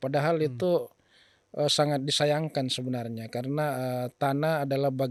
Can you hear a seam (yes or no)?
no